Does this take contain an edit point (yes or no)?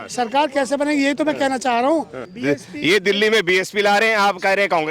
yes